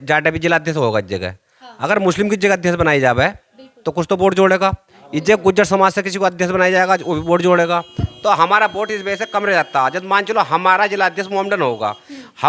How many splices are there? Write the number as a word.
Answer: zero